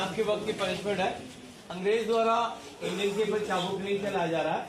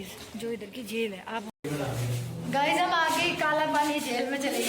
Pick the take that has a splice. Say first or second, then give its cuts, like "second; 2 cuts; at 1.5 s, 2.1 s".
second; 1 cut; at 1.6 s